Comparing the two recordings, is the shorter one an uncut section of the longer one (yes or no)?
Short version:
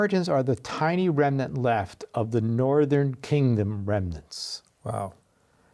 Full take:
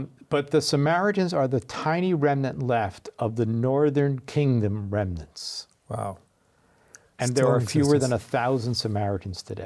yes